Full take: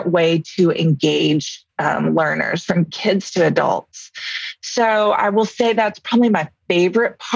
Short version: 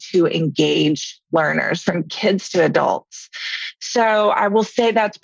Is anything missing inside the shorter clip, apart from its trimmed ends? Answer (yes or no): yes